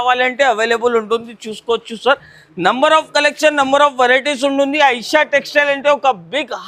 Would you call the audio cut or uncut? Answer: uncut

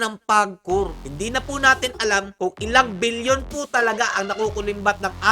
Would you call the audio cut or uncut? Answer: cut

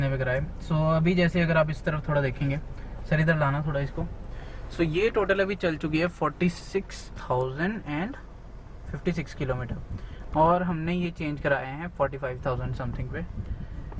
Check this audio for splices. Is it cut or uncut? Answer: uncut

